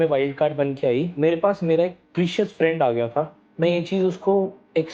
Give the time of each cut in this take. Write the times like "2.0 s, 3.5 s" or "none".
1.1 s, 3.3 s